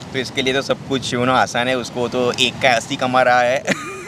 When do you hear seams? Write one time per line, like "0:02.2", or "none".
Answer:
none